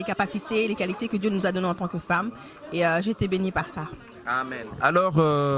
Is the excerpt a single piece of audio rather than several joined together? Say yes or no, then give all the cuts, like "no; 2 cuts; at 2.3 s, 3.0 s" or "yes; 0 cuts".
yes; 0 cuts